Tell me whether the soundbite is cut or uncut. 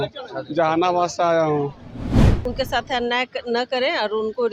cut